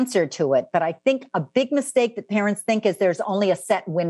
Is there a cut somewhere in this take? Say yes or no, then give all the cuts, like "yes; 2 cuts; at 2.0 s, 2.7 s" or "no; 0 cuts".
no; 0 cuts